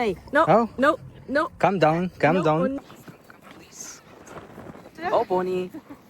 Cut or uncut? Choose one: cut